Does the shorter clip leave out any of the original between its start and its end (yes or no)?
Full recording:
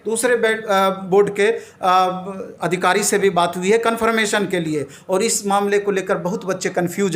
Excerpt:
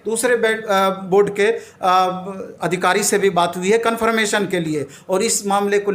no